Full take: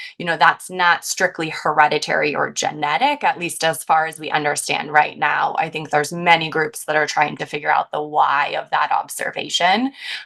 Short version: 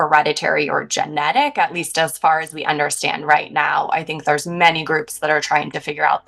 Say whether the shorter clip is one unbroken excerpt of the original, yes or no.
yes